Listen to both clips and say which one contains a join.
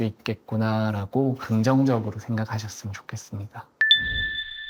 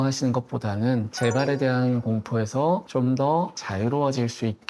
second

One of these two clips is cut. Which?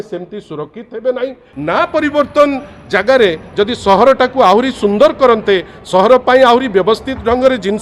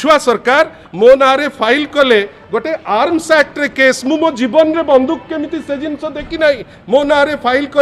first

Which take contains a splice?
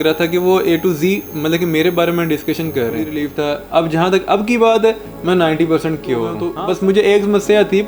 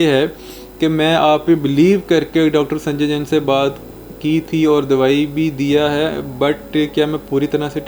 first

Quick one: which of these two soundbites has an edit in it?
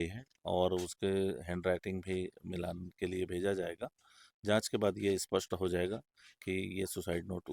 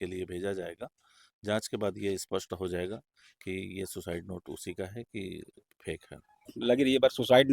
second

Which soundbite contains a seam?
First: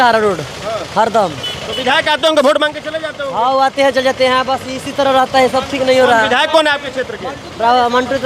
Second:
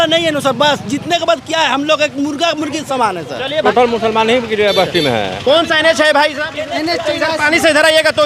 second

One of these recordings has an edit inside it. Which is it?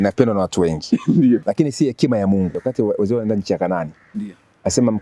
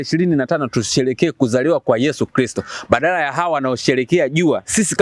first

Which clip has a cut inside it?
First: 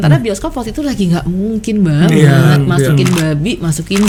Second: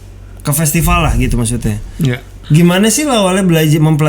second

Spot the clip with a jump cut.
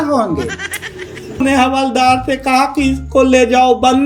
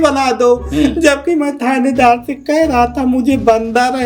first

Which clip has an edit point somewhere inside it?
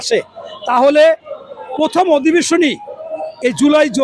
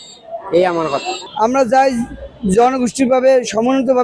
second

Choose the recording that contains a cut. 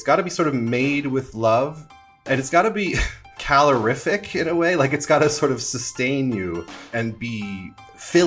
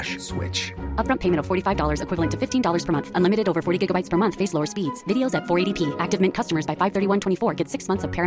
first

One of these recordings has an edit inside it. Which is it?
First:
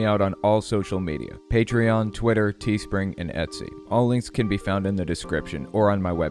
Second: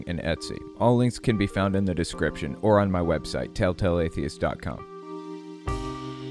second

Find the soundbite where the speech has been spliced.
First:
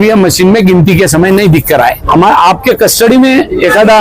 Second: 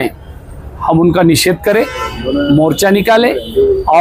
first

